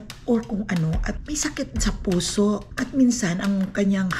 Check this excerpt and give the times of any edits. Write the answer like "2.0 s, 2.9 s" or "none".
1.2 s